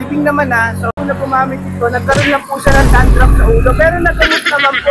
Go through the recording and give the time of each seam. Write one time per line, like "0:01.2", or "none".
0:00.9